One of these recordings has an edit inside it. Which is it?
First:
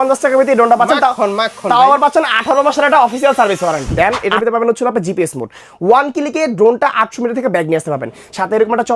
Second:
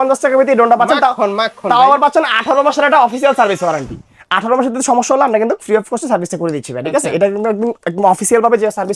first; 1 cut; at 3.9 s

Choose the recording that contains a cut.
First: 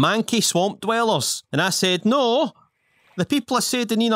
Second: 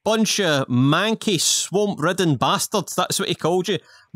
first; 1 cut; at 1.4 s

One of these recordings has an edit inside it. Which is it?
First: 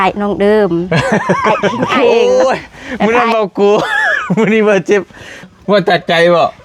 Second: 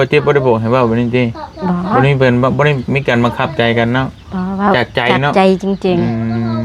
first; 2 cuts; at 2.1 s, 5.5 s

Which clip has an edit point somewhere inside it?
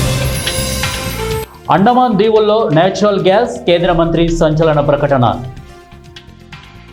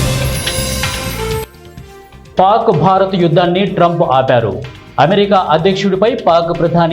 second; 1 cut; at 1.5 s

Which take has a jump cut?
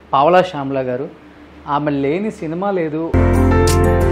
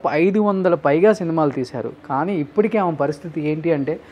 first; 1 cut; at 3.1 s

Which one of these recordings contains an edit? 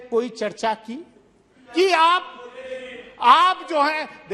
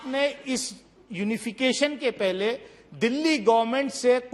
first; 1 cut; at 1.6 s

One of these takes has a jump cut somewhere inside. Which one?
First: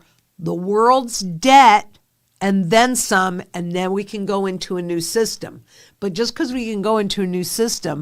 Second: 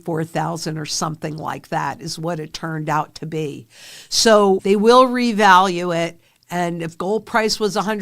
second; 1 cut; at 4.6 s

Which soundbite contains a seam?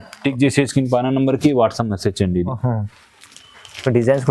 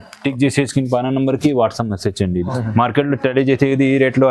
second; 1 cut; at 2.5 s

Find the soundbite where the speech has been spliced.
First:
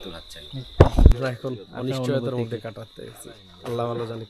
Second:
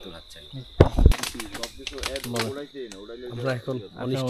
first; 1 cut; at 1.1 s

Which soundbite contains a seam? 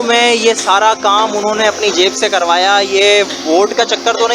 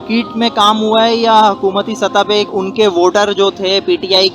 second; 1 cut; at 2.5 s

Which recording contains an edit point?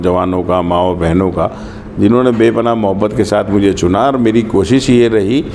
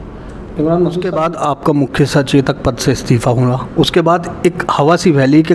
second; 1 cut; at 1.3 s

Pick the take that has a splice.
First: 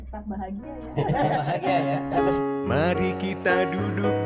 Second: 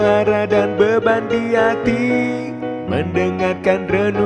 first; 1 cut; at 2.0 s

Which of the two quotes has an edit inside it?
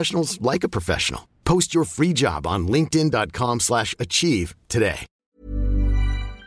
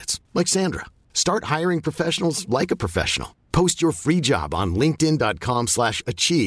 first; 1 cut; at 5.3 s

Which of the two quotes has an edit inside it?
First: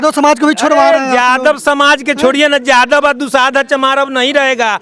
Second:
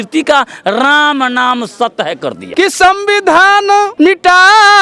second; 2 cuts; at 2.4 s, 3.9 s

